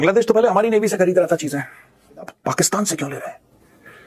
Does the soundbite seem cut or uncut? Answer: cut